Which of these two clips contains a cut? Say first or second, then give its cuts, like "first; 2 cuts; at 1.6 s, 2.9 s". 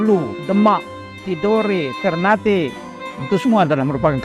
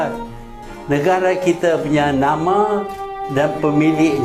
first; 1 cut; at 1.2 s